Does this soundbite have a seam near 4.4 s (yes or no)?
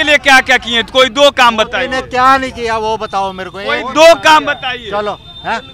no